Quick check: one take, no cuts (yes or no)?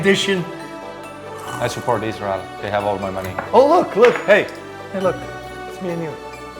no